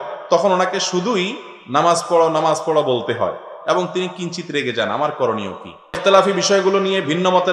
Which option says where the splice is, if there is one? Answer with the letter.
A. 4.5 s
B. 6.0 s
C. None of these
B